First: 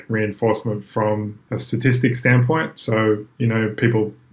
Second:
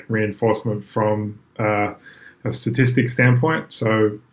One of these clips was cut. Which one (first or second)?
first